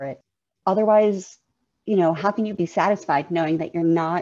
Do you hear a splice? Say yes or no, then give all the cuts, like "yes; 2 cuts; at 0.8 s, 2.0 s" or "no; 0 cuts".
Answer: yes; 1 cut; at 2.6 s